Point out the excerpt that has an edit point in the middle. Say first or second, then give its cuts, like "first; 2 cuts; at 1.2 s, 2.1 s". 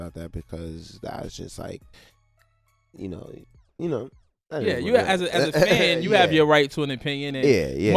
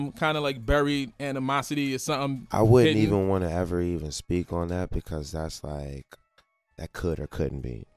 first; 1 cut; at 5.5 s